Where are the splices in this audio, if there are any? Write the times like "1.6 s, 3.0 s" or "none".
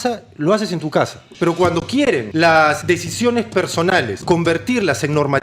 1.2 s, 2.3 s, 4.2 s